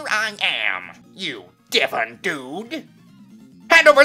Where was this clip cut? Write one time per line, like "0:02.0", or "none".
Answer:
0:01.0